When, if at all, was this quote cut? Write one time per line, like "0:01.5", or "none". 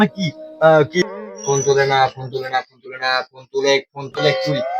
0:01.0